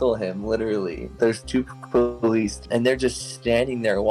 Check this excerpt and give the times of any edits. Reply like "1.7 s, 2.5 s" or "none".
2.6 s